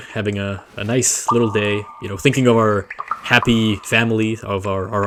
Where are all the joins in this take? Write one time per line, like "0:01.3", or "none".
none